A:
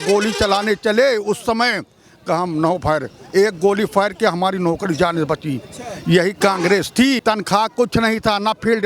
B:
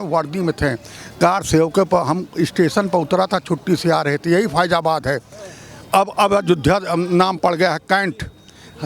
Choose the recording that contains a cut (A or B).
A